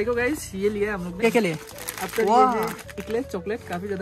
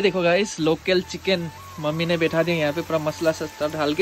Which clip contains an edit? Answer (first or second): first